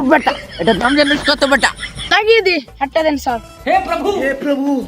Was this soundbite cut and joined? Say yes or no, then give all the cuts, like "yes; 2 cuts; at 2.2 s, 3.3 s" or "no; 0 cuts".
yes; 1 cut; at 2.1 s